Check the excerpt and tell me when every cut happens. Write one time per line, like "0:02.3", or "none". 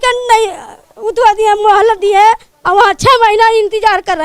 none